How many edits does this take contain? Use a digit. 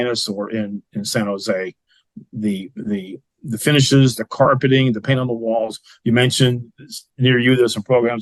0